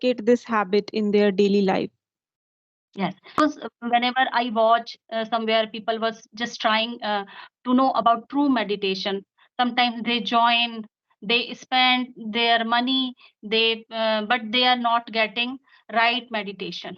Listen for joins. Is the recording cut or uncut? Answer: cut